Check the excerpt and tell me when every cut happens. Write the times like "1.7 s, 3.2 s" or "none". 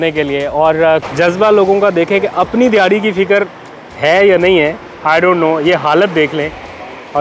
1.0 s